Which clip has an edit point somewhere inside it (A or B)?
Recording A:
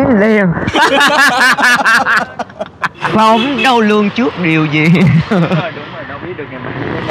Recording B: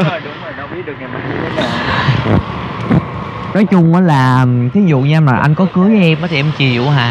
A